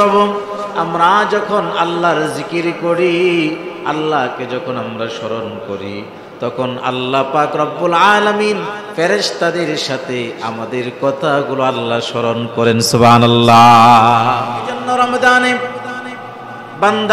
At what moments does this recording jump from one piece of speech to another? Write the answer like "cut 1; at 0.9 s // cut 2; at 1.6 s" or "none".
cut 1; at 14.8 s